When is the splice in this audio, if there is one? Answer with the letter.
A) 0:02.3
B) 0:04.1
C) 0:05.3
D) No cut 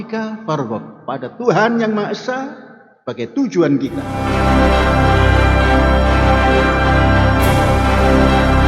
B